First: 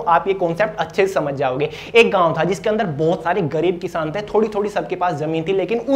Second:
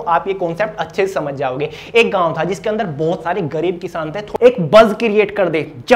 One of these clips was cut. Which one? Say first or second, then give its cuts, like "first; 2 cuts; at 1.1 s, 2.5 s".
second; 1 cut; at 4.2 s